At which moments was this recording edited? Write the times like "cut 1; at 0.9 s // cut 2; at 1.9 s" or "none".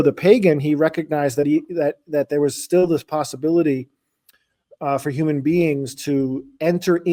none